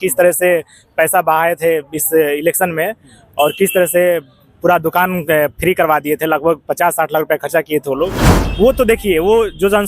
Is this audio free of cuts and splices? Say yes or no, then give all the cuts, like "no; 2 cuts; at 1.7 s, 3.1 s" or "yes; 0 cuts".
no; 1 cut; at 8.3 s